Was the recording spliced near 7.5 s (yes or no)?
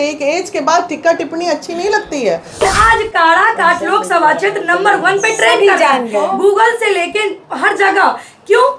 no